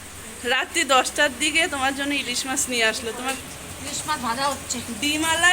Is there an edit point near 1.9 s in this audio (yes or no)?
no